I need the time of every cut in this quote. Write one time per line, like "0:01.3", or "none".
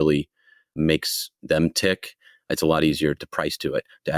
0:00.7
0:02.5
0:03.2

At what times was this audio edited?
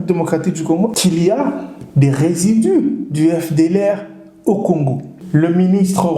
0:00.9
0:05.1

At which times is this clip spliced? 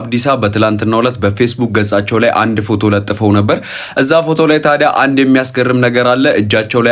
none

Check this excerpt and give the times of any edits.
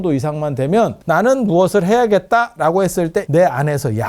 0:01.0
0:03.3

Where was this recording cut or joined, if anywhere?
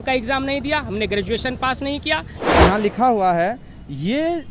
0:02.3

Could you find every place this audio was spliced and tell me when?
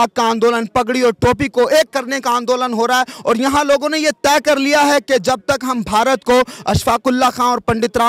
none

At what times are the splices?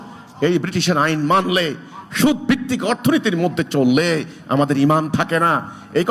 none

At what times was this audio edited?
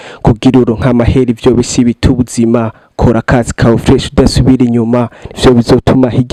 none

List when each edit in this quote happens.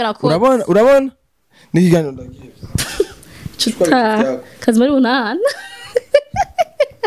none

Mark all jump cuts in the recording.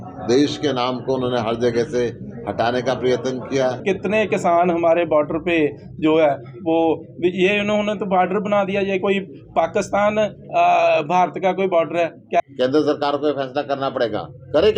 0:03.8
0:12.4

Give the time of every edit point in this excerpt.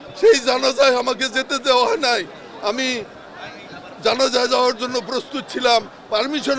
none

